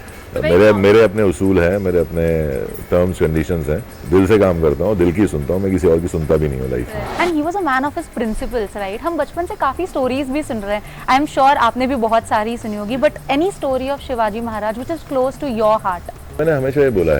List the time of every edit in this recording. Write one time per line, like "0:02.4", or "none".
0:04.0
0:07.0